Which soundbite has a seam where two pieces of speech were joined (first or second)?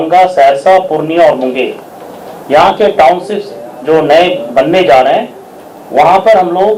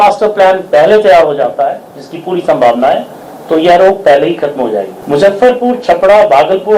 second